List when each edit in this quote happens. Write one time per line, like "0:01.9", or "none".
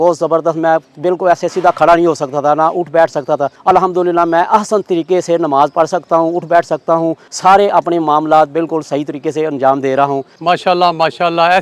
0:03.5
0:07.3
0:10.3